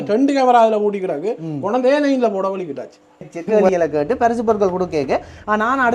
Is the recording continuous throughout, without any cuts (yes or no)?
no